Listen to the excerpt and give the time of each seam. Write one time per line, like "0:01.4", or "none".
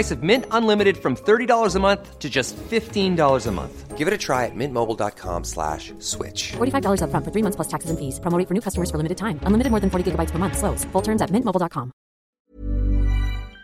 0:12.4